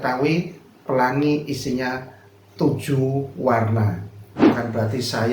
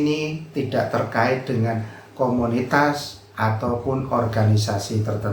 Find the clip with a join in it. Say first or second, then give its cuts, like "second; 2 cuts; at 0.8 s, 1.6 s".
first; 1 cut; at 4.4 s